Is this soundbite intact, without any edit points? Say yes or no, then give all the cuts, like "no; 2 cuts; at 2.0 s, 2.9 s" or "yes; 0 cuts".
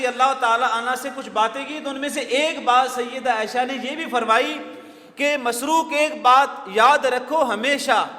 yes; 0 cuts